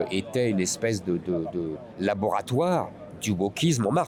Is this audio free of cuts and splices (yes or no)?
yes